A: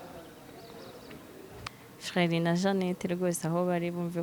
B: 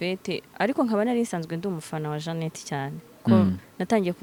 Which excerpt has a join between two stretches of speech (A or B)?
A